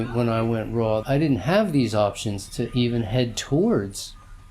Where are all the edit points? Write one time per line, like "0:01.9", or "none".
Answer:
0:01.0